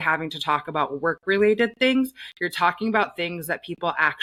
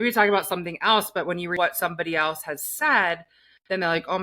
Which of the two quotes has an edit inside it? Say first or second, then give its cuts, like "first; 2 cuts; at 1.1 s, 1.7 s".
second; 1 cut; at 1.5 s